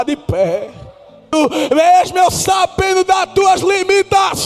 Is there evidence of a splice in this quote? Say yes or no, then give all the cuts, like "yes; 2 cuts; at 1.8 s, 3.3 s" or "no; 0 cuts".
yes; 1 cut; at 1.3 s